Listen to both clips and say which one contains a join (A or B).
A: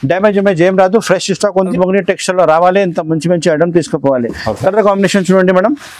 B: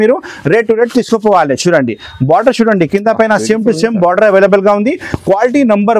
A